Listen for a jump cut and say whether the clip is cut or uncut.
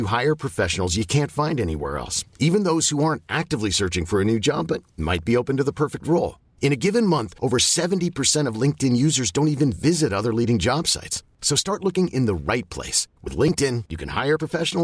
uncut